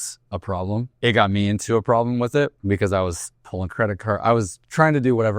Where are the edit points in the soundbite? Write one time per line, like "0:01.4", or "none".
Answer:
0:00.9
0:02.6